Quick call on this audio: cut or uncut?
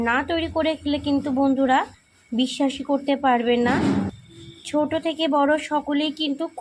uncut